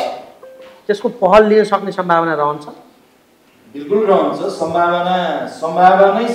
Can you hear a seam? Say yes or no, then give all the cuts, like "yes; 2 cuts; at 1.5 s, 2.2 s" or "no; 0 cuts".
no; 0 cuts